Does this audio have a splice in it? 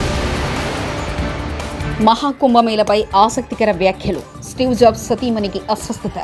no; 0 cuts

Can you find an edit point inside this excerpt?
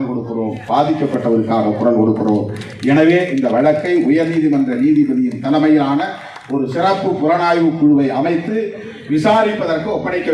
no; 0 cuts

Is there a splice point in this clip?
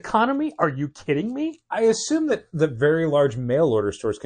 no; 0 cuts

